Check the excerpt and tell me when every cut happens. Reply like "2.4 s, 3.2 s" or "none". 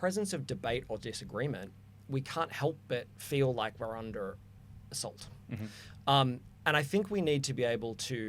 none